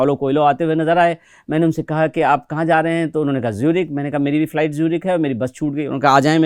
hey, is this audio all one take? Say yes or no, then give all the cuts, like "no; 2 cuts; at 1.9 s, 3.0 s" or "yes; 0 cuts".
yes; 0 cuts